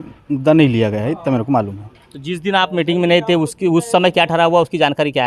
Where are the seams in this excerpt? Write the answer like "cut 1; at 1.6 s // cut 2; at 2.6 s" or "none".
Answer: none